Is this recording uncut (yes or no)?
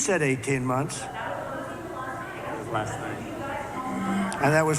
yes